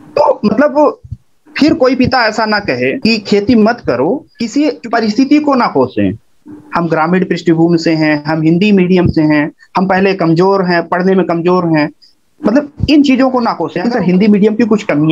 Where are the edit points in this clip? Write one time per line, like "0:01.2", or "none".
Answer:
0:03.0
0:04.3
0:13.7